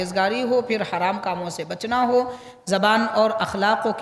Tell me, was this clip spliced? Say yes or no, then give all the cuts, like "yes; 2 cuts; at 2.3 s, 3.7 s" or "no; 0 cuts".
no; 0 cuts